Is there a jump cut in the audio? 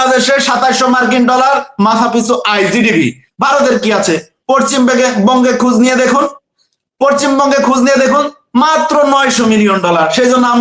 no; 0 cuts

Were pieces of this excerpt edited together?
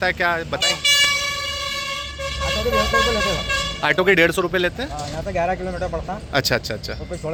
no; 0 cuts

